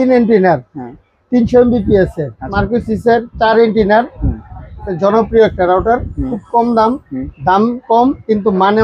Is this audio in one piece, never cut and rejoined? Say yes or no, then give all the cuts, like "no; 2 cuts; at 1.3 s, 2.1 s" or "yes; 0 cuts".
no; 1 cut; at 2.5 s